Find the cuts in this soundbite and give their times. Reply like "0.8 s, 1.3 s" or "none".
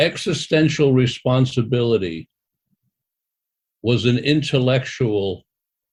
none